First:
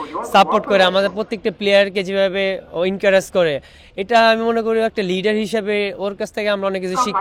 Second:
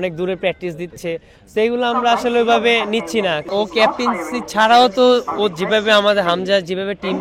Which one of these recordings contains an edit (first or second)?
second